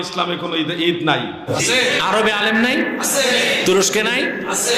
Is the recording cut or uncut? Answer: cut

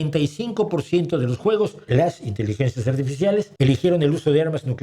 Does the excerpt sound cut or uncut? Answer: cut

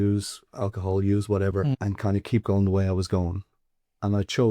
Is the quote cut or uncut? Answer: cut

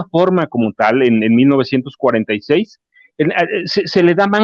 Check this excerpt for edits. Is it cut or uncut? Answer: uncut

